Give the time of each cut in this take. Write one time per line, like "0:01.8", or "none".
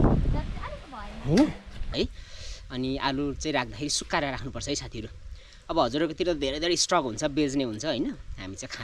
0:01.9